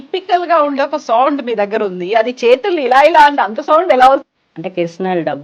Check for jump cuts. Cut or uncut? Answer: cut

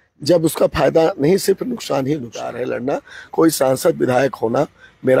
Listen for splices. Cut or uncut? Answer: cut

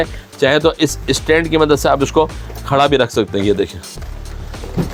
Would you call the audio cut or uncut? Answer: uncut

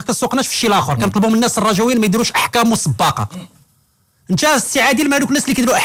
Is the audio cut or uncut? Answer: uncut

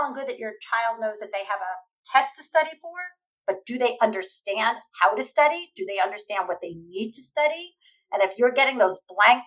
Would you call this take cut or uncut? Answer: uncut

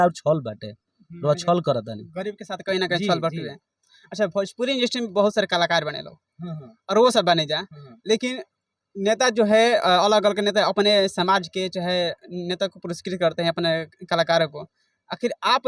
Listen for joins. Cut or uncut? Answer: uncut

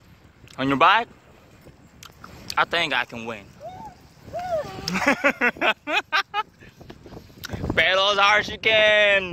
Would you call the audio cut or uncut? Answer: uncut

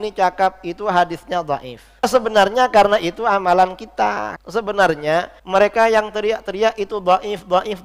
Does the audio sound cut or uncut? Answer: cut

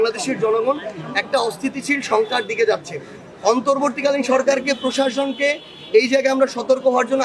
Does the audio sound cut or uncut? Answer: uncut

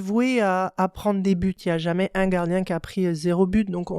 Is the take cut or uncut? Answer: cut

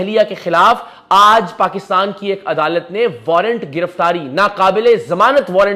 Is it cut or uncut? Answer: uncut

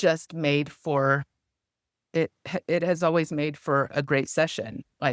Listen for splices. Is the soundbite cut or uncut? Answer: uncut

